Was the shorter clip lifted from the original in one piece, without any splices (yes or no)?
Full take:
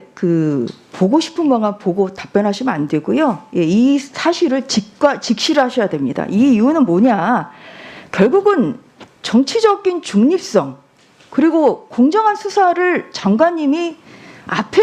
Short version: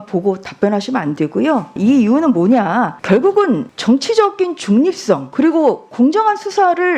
no